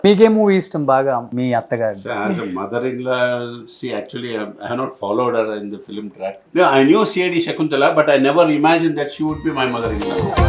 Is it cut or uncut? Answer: cut